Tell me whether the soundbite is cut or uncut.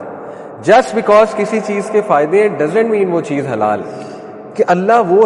cut